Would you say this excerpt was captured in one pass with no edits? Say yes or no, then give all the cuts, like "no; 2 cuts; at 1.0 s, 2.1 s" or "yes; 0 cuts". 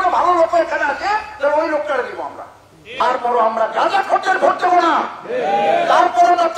no; 1 cut; at 3.0 s